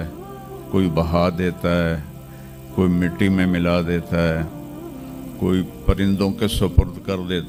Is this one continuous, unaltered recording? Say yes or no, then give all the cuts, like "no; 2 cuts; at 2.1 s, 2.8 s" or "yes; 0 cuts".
yes; 0 cuts